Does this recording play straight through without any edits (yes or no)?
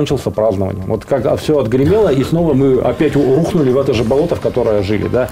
yes